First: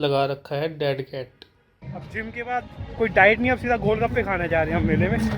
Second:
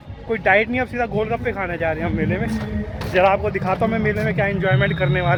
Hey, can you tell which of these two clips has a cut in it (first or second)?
first